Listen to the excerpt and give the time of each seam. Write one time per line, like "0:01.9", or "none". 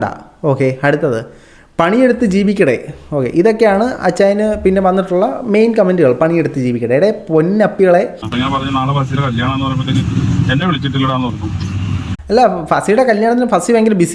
0:08.2